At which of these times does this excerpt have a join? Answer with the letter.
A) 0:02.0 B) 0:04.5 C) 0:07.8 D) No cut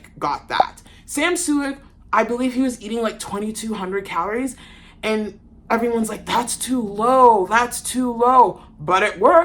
D